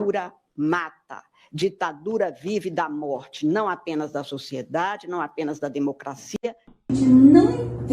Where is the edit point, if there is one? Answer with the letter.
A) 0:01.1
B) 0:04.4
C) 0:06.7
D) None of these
C